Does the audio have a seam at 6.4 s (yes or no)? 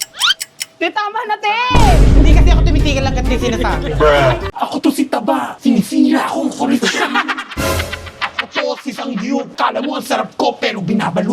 no